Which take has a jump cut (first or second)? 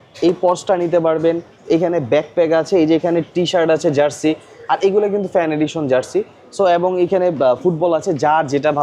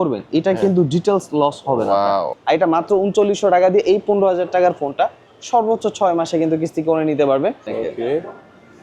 second